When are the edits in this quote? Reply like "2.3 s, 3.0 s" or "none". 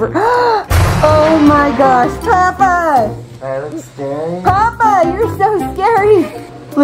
none